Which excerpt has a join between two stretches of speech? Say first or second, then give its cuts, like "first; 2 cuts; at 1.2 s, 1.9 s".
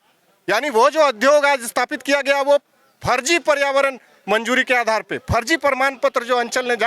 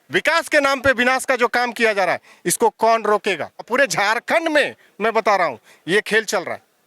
second; 1 cut; at 3.7 s